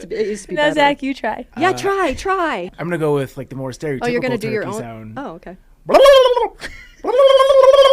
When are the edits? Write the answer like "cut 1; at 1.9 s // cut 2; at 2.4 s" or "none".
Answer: cut 1; at 1.5 s // cut 2; at 2.5 s